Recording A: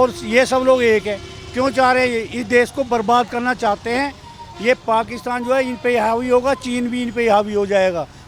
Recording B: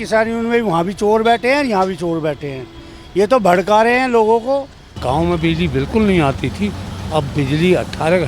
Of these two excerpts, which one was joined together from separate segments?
B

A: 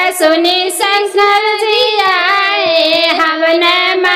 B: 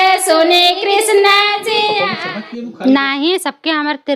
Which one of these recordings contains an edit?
B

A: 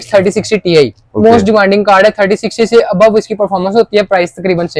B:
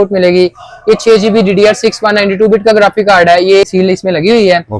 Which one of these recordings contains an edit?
B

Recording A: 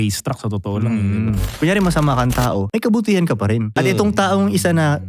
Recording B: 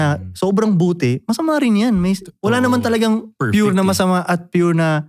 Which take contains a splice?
A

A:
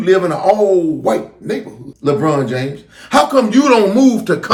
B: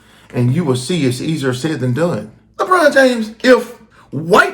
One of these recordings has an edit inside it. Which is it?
B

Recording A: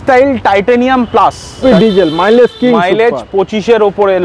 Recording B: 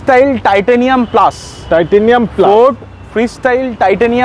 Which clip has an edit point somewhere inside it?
A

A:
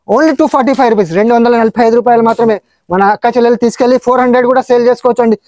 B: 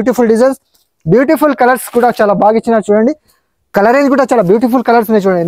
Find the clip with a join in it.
B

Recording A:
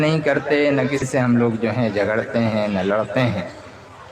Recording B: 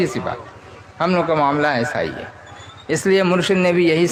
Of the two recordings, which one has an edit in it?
A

